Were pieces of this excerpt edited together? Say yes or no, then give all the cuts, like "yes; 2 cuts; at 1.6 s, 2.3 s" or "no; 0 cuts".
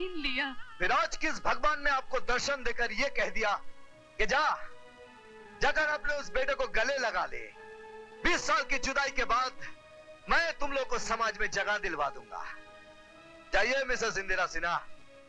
no; 0 cuts